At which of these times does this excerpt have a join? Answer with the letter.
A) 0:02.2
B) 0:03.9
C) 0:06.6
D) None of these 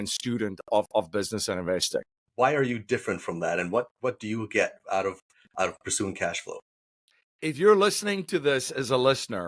A